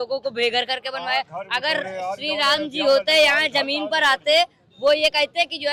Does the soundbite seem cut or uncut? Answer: uncut